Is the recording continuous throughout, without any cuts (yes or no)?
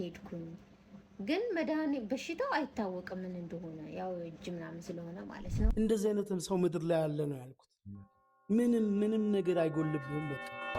no